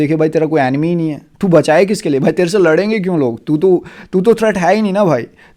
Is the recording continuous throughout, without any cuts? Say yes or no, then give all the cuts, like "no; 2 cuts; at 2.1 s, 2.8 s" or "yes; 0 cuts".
yes; 0 cuts